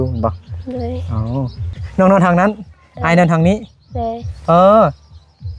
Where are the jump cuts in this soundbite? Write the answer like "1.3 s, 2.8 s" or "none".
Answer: 1.7 s